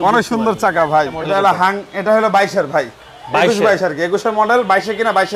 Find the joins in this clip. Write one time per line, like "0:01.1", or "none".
0:01.2